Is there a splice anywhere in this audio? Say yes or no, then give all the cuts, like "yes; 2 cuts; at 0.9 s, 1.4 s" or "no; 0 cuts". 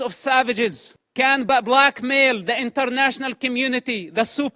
yes; 1 cut; at 1.5 s